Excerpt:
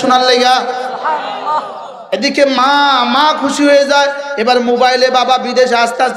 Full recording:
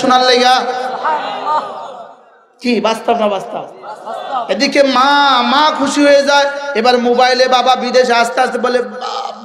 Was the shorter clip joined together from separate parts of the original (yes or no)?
yes